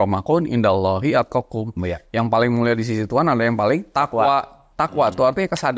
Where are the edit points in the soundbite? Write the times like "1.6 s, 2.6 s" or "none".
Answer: 4.6 s